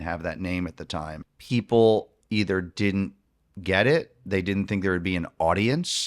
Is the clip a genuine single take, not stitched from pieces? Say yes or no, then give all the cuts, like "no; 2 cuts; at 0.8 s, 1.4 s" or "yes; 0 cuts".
no; 1 cut; at 1.3 s